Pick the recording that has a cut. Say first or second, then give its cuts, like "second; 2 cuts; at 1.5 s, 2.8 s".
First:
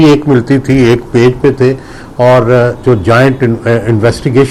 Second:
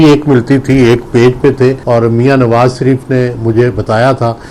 second; 1 cut; at 1.8 s